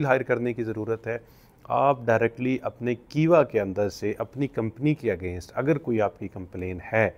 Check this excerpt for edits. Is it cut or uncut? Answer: uncut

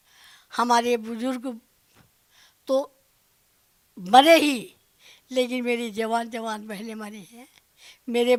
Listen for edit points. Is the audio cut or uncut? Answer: uncut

